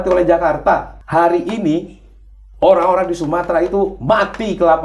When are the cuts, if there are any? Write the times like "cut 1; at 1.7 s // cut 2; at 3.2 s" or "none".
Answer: cut 1; at 1.0 s